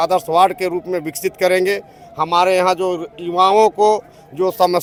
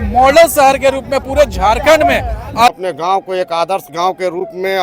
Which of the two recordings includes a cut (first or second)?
second